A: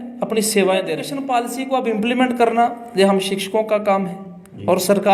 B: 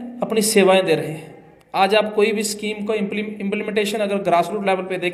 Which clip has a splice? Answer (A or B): A